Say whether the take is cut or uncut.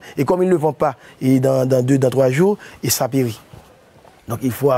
cut